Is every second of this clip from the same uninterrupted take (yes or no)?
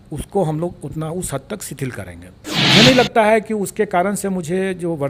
no